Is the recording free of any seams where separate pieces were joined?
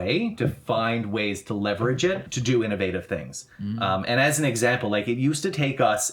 no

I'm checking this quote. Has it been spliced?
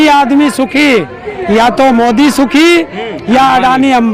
no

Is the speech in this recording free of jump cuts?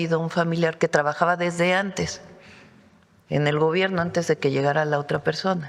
yes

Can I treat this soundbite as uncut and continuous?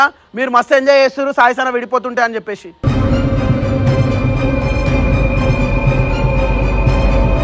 yes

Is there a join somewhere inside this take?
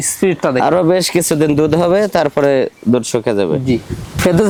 no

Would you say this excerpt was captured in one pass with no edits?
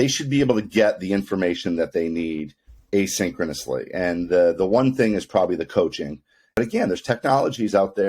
no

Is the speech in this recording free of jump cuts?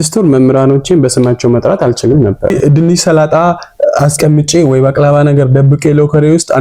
no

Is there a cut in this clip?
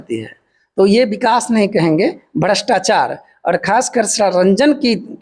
no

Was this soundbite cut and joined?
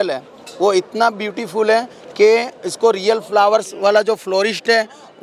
no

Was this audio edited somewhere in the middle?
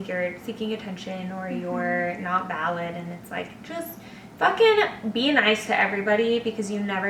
no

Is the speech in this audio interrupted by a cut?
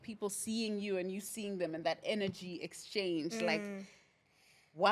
no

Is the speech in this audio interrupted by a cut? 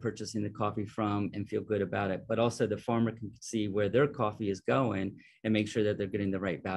no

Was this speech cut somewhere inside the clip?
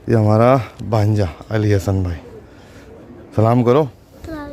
no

